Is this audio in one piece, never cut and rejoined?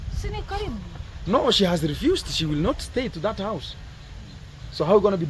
yes; 0 cuts

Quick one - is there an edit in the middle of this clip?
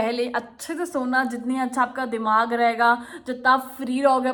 no; 0 cuts

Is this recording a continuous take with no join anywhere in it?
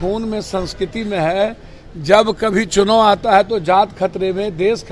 yes; 0 cuts

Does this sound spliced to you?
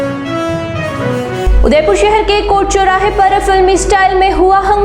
no; 0 cuts

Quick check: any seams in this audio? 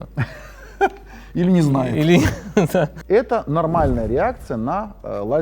no; 0 cuts

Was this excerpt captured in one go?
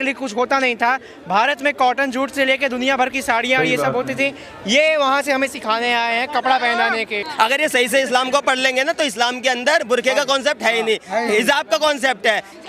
no; 1 cut; at 7.2 s

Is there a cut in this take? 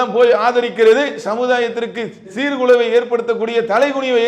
yes; 1 cut; at 1.2 s

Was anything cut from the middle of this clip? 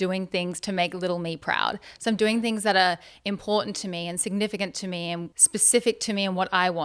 yes; 1 cut; at 5.3 s

